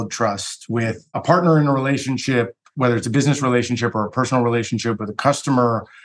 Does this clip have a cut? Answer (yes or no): yes